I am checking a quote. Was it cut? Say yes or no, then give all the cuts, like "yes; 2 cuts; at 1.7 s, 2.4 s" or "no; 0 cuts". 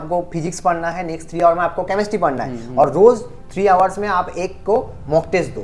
no; 0 cuts